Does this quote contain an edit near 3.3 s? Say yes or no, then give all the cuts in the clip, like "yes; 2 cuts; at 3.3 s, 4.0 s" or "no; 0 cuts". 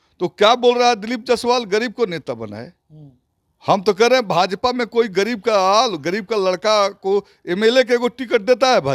no; 0 cuts